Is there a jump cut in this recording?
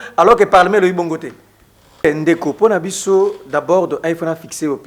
yes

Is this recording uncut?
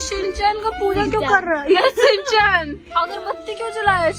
yes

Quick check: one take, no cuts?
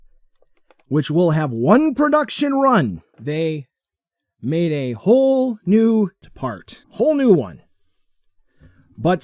no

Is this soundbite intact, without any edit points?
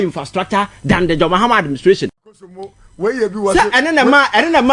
no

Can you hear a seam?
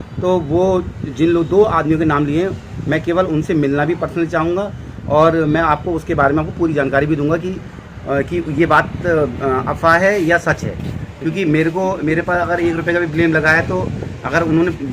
no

